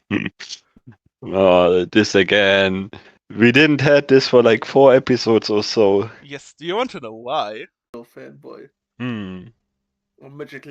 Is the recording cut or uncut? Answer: cut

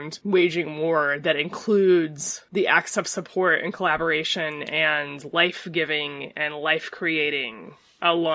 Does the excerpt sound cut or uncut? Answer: uncut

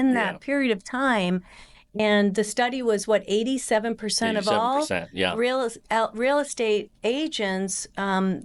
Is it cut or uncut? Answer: uncut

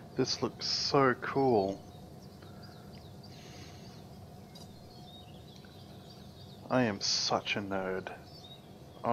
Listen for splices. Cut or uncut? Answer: uncut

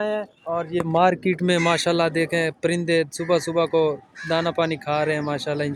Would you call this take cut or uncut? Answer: uncut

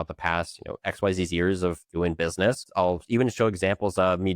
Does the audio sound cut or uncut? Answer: cut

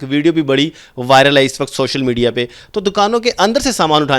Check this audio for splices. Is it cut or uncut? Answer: uncut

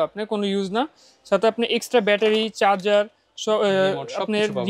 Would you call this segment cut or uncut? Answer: uncut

